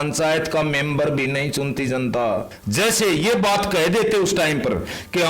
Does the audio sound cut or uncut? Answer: cut